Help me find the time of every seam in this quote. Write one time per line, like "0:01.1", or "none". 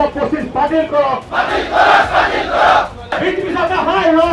0:03.2